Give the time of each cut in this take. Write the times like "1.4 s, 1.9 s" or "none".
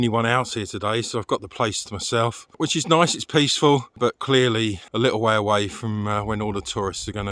2.6 s, 4.9 s